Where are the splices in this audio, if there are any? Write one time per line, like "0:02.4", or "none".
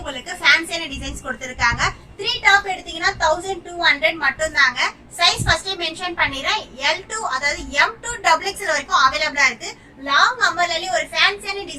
none